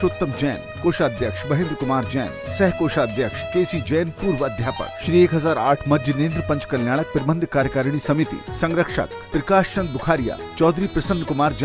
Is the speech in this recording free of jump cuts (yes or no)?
no